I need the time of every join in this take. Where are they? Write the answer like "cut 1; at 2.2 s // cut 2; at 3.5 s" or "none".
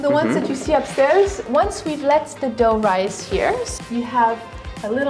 cut 1; at 1.5 s // cut 2; at 3.7 s